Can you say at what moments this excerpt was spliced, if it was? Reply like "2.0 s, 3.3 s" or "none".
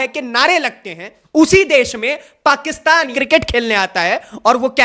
1.1 s, 3.1 s